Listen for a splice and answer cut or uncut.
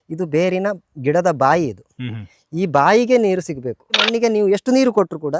cut